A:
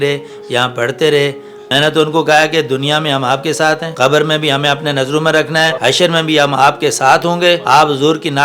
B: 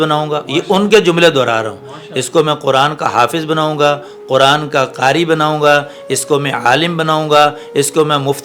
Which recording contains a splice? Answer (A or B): A